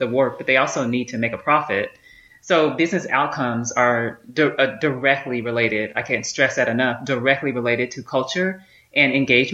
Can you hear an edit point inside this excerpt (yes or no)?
no